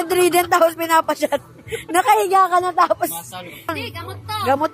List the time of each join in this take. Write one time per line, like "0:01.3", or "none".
0:03.7